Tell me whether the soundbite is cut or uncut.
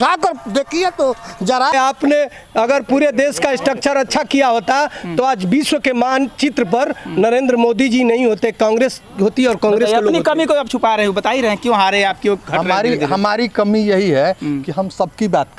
cut